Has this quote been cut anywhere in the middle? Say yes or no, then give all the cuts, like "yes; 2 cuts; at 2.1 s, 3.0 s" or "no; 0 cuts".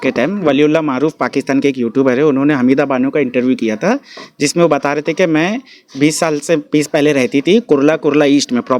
no; 0 cuts